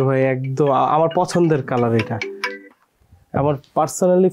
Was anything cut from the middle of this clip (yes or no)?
no